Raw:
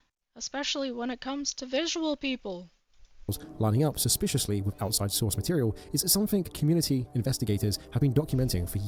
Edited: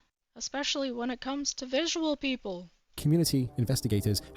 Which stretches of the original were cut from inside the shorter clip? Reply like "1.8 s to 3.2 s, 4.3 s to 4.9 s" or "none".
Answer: 3.0 s to 6.5 s